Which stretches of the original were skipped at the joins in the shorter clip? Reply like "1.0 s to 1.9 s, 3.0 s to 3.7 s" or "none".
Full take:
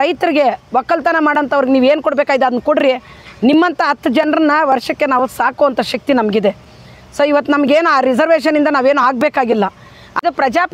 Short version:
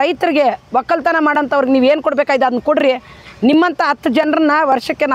none